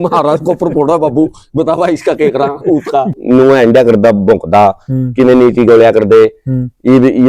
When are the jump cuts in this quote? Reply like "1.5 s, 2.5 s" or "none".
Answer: 3.2 s